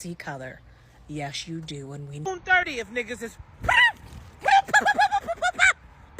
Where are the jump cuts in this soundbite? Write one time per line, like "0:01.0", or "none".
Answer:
0:02.3